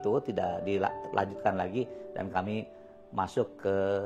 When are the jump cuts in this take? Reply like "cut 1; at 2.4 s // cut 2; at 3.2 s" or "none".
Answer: none